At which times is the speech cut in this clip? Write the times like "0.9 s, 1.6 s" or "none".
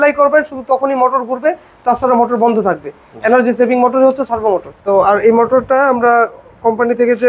4.7 s